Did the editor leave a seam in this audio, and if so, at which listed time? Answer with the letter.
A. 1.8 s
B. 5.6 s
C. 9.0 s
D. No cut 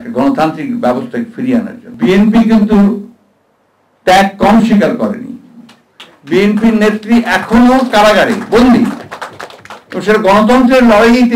A